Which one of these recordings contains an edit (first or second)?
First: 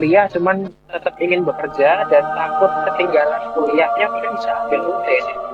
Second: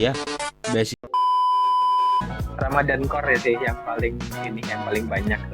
second